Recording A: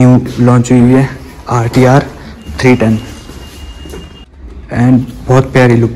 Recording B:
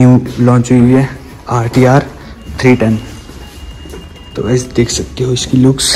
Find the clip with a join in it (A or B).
A